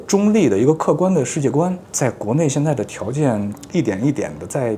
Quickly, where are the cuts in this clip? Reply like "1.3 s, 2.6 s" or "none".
none